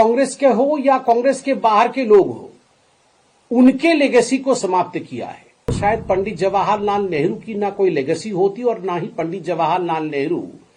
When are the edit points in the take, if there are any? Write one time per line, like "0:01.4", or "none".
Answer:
0:05.8